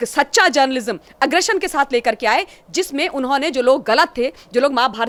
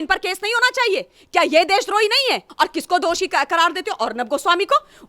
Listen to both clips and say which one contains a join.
second; 1 cut; at 2.5 s

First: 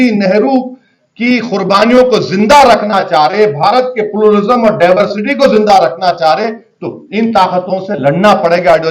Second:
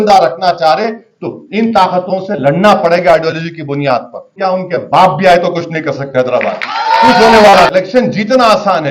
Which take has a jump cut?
second; 2 cuts; at 4.3 s, 7.7 s

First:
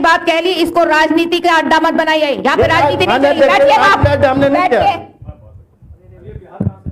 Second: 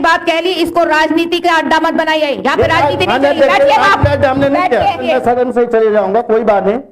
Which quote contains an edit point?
second; 1 cut; at 5.0 s

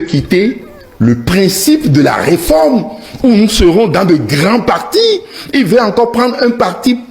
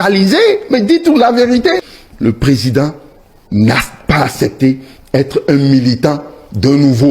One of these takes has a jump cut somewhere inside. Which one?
second; 1 cut; at 2.0 s

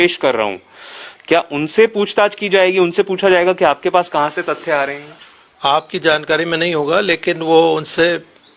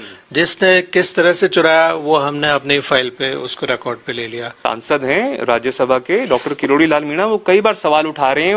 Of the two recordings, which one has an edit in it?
second; 1 cut; at 4.6 s

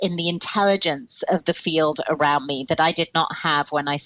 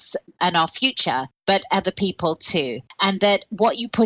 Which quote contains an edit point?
second; 2 cuts; at 1.3 s, 2.8 s

